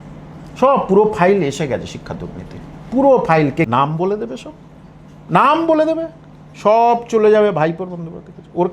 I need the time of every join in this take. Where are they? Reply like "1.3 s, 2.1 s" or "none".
3.7 s